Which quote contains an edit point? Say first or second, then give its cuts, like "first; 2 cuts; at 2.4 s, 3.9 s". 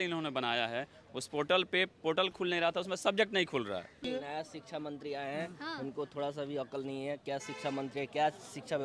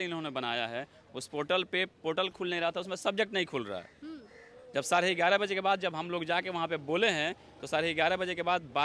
first; 1 cut; at 4.1 s